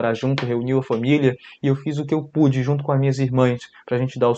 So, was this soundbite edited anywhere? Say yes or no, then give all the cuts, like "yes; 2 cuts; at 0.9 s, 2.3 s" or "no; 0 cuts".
no; 0 cuts